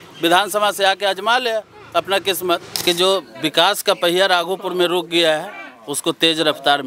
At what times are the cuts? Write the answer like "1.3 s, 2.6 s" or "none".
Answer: 2.8 s

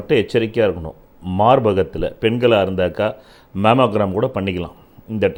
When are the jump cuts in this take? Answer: none

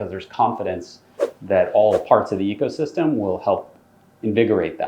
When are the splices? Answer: none

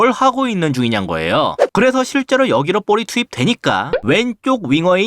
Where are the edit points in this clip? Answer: 1.6 s

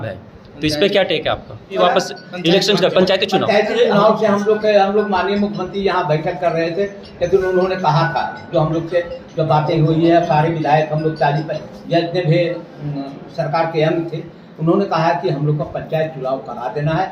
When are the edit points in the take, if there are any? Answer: 1.8 s

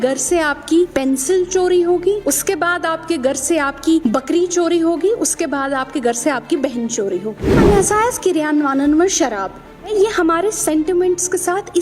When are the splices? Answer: 0.9 s, 2.2 s, 4.0 s, 7.5 s, 9.9 s

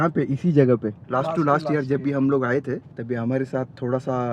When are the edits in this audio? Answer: 1.0 s, 2.9 s

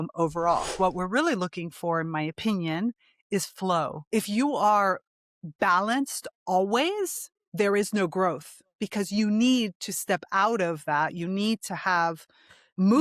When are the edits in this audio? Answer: 0.8 s, 4.0 s

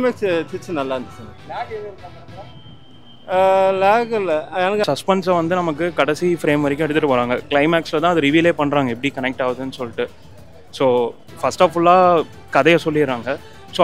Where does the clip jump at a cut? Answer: 4.8 s

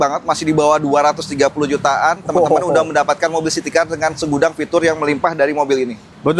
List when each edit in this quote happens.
none

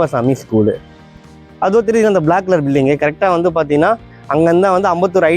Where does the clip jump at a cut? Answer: 1.1 s

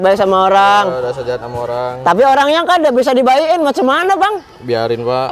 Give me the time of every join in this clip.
none

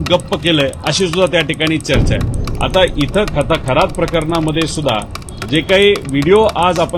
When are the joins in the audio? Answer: none

